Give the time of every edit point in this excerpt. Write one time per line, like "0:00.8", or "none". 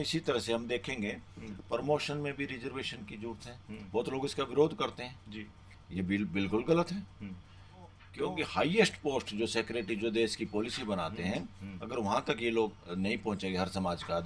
0:08.0

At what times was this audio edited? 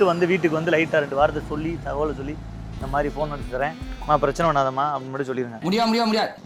none

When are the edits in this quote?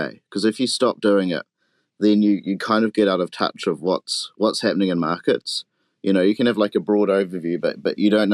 none

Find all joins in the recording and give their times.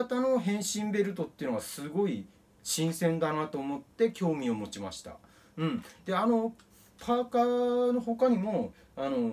none

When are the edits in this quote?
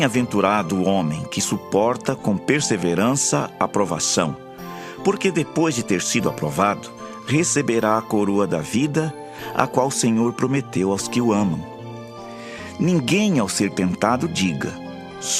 0:12.5

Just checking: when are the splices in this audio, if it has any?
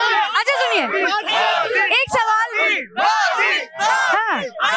none

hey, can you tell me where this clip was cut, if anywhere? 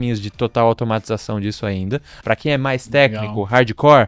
0:02.1

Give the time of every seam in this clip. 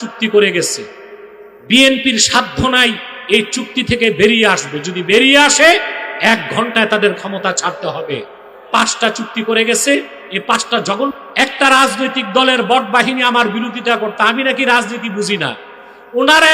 0:11.1

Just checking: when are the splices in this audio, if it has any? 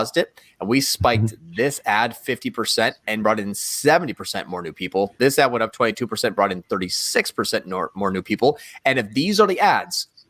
none

